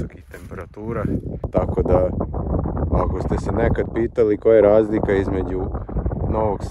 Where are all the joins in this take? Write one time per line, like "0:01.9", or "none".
0:01.4